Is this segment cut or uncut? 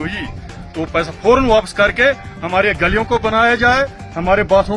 uncut